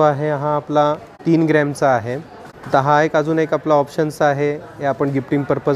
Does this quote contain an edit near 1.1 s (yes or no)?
yes